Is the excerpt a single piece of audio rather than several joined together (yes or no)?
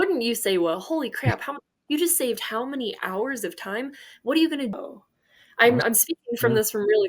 no